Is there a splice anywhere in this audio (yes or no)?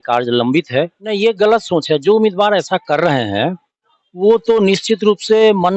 yes